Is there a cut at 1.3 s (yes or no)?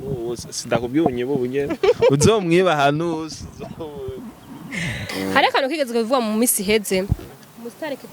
no